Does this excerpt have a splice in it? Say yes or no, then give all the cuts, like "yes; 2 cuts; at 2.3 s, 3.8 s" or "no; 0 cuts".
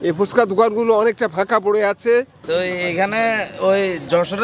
yes; 1 cut; at 2.4 s